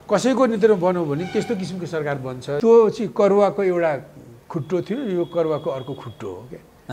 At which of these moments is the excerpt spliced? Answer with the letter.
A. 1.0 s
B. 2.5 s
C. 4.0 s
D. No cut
B